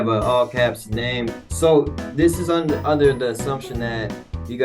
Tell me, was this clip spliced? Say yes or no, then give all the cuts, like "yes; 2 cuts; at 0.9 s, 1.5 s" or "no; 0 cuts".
yes; 1 cut; at 1.3 s